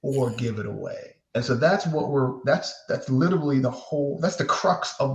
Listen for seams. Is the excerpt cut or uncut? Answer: uncut